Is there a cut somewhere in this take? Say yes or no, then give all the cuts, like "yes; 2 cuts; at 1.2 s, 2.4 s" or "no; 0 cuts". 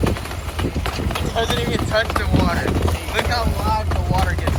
no; 0 cuts